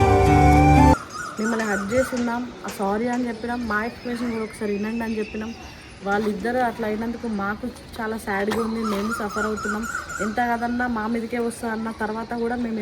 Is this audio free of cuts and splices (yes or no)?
no